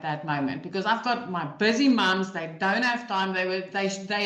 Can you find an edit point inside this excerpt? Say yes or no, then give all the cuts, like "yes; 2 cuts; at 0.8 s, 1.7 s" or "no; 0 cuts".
no; 0 cuts